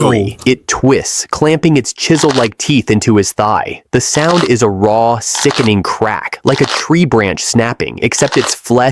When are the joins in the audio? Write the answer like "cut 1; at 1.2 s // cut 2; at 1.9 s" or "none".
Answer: none